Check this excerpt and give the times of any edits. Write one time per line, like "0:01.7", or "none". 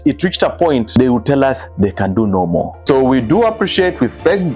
0:02.7